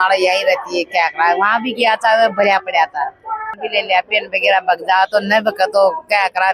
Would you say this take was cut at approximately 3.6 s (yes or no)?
yes